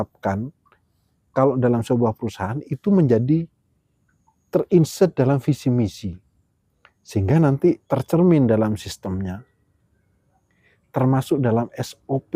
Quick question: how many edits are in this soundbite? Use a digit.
1